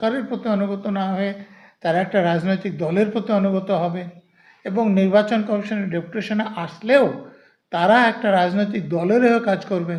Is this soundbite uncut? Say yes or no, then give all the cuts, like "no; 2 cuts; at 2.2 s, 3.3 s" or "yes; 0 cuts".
yes; 0 cuts